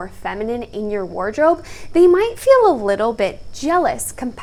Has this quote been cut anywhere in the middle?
no; 0 cuts

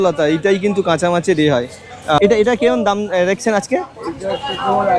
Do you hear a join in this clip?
yes; 1 cut; at 2.2 s

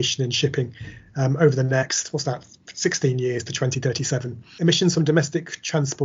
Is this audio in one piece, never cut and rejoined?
no; 1 cut; at 4.5 s

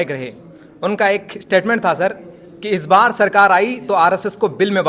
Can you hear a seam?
no; 0 cuts

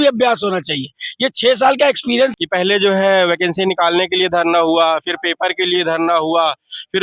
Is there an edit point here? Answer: yes; 1 cut; at 2.3 s

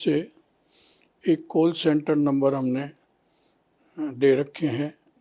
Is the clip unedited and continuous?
yes; 0 cuts

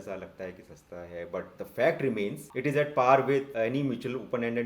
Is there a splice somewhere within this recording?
yes; 2 cuts; at 2.4 s, 3.5 s

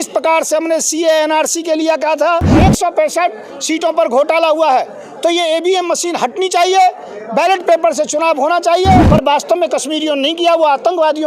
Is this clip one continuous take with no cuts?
no; 2 cuts; at 2.6 s, 9.1 s

